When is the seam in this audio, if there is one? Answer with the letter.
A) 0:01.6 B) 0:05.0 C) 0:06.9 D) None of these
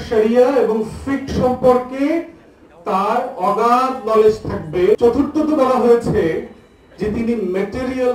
B